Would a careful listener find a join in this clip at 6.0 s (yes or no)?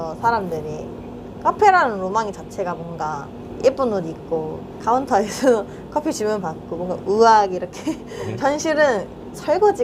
no